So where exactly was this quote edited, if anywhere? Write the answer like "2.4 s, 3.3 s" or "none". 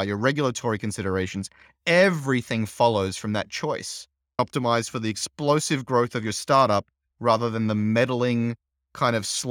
4.4 s